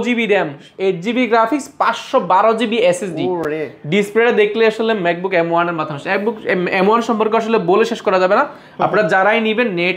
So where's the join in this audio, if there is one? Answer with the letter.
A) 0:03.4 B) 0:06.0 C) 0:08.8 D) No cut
D